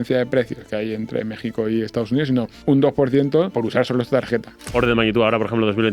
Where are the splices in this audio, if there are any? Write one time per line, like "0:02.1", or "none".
0:02.5
0:03.5
0:04.7